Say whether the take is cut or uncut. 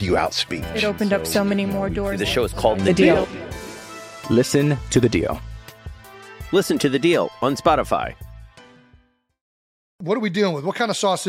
cut